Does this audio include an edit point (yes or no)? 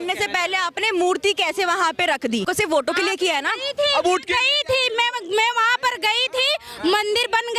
yes